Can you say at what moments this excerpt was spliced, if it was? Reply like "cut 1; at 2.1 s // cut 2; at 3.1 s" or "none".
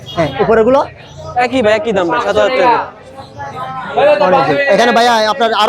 none